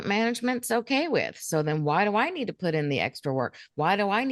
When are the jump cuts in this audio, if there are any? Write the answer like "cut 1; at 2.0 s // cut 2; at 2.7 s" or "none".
none